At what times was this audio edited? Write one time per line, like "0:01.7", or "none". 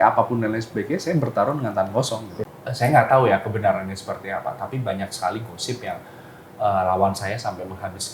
0:02.6